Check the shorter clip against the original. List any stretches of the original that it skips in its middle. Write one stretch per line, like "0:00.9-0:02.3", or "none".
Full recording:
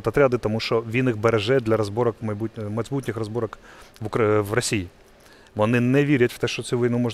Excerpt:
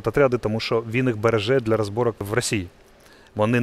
0:02.2-0:04.4